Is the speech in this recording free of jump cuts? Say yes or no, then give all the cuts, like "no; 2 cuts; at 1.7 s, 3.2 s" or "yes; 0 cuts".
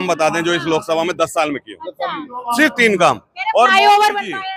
yes; 0 cuts